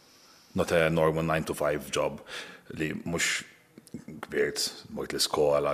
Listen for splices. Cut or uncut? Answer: uncut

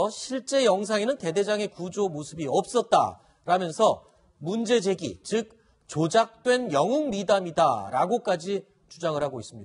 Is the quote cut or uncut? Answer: cut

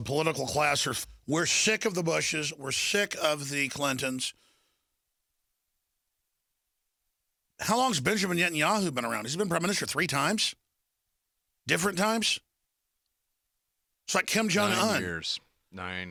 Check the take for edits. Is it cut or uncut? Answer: uncut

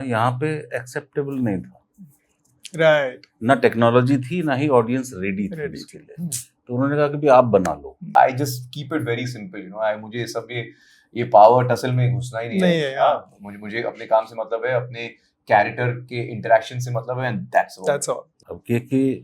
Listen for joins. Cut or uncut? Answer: cut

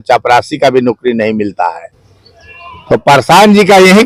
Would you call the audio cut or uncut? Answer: uncut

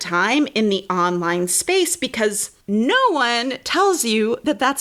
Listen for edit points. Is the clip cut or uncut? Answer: cut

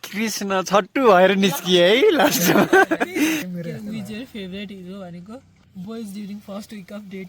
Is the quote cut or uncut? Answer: cut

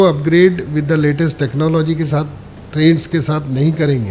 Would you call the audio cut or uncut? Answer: uncut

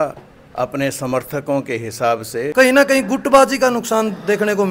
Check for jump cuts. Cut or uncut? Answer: cut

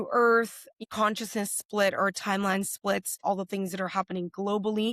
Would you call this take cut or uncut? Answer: cut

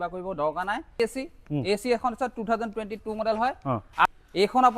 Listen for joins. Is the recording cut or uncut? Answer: cut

